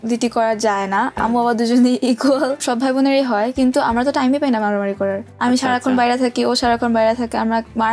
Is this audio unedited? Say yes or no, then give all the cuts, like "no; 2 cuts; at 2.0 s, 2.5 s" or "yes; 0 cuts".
no; 3 cuts; at 1.1 s, 2.6 s, 5.3 s